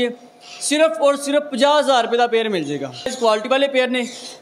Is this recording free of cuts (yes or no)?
no